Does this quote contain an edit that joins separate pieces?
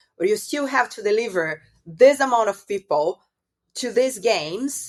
no; 0 cuts

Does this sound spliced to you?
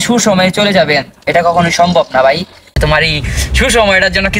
yes; 1 cut; at 2.6 s

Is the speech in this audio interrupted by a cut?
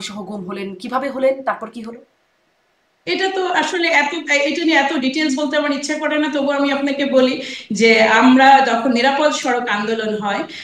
no; 0 cuts

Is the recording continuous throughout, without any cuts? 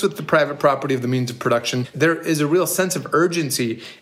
no; 1 cut; at 1.9 s

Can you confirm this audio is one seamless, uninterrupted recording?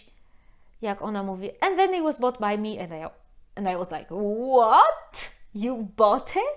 yes; 0 cuts

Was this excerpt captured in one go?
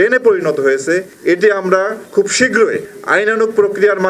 no; 1 cut; at 2.9 s

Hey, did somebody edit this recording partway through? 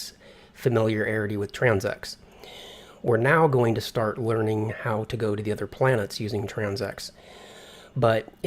yes; 1 cut; at 4.2 s

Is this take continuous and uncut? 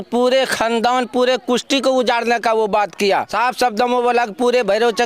no; 1 cut; at 3.3 s

